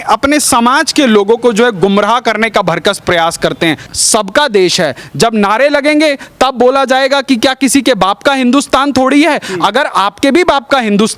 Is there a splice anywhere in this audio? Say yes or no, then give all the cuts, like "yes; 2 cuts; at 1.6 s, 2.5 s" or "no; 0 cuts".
yes; 1 cut; at 3.9 s